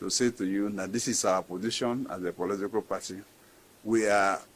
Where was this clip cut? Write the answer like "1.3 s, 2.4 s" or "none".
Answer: none